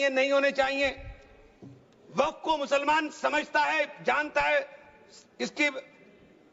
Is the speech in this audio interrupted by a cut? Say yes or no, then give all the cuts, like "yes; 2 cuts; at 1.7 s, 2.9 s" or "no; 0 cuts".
no; 0 cuts